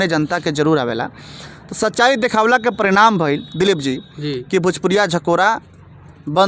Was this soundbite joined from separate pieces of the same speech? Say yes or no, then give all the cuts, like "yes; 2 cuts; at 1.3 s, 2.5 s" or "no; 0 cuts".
no; 0 cuts